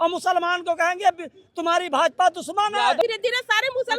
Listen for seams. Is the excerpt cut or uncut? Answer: cut